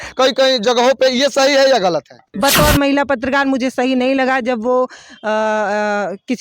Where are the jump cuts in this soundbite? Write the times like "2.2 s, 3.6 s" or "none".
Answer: 2.6 s